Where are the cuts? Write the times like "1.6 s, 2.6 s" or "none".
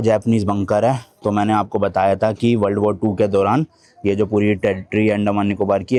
none